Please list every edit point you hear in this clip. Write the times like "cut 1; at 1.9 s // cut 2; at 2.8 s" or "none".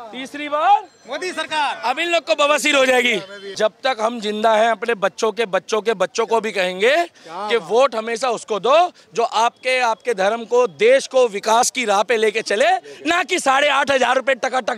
cut 1; at 3.5 s